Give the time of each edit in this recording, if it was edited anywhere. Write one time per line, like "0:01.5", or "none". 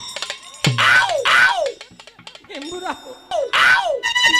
0:03.3